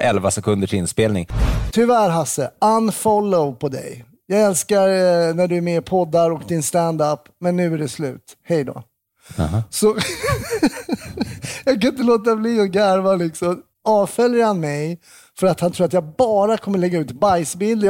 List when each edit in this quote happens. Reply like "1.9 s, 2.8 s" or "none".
1.6 s, 13.6 s